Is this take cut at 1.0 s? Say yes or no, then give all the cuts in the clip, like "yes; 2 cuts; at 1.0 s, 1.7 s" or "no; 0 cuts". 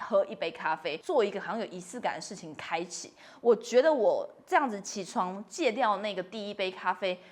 yes; 1 cut; at 1.0 s